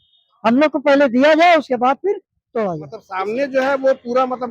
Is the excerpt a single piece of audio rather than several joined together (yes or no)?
no